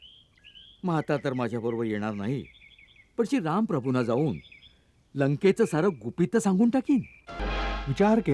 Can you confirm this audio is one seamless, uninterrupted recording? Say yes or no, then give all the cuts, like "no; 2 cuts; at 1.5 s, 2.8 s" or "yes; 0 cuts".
no; 1 cut; at 7.3 s